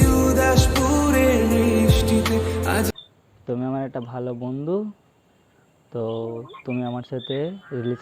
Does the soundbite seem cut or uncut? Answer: cut